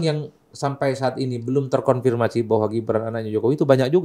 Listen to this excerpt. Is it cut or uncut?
uncut